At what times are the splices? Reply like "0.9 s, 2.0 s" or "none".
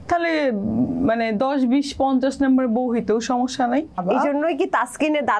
4.0 s